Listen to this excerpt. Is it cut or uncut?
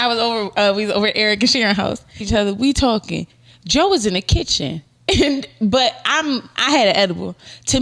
cut